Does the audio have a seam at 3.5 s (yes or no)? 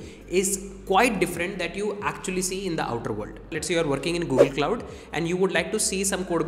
yes